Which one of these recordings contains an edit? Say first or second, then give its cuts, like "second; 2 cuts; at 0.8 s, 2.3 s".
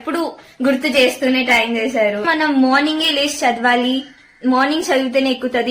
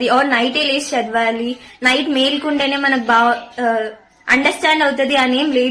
first; 1 cut; at 2.2 s